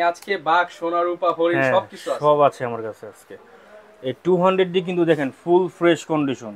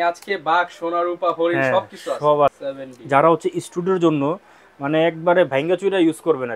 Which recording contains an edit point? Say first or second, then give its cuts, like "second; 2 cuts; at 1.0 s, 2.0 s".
second; 1 cut; at 2.6 s